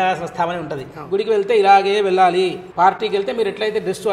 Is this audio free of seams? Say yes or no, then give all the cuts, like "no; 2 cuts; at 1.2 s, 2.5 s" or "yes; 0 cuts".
no; 2 cuts; at 0.9 s, 2.6 s